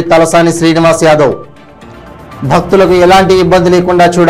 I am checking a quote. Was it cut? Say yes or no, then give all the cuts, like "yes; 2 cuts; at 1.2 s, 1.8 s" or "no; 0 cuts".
no; 0 cuts